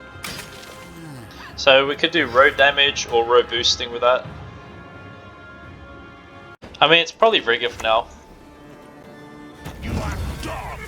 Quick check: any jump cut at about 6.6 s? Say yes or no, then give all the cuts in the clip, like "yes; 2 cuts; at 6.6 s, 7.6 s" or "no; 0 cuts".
yes; 1 cut; at 6.6 s